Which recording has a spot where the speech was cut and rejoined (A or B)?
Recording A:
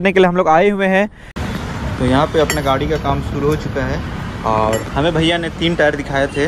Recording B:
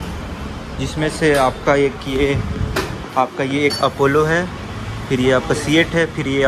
A